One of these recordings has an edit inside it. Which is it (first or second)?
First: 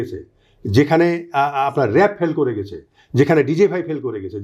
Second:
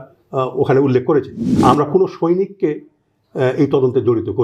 second